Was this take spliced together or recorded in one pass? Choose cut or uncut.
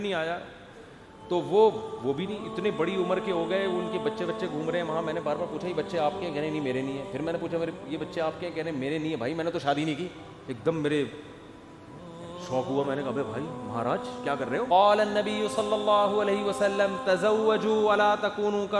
cut